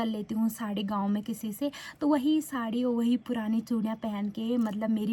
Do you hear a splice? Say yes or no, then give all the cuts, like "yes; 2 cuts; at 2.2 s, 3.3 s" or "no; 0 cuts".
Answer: no; 0 cuts